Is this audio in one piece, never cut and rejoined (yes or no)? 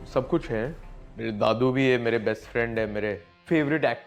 yes